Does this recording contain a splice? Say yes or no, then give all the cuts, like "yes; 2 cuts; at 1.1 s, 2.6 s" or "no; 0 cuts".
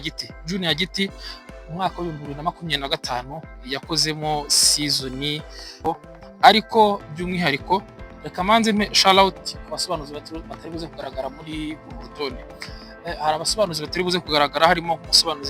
yes; 1 cut; at 5.8 s